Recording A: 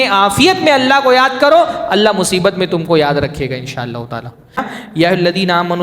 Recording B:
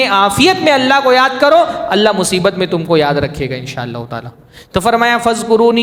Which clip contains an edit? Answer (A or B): A